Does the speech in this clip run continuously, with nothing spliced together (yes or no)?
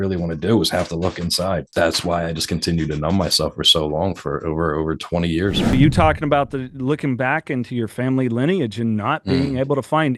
no